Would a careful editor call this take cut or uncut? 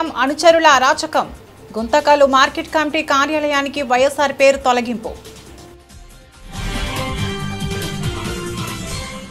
cut